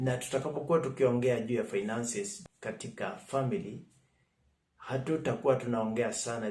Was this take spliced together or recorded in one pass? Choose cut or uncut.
cut